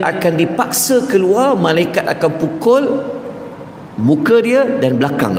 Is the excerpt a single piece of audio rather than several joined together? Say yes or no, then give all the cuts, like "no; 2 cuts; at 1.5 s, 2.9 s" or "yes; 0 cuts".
yes; 0 cuts